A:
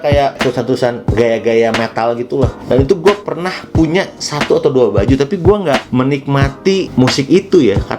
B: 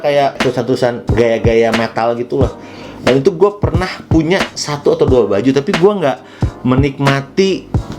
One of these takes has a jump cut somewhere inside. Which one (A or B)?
A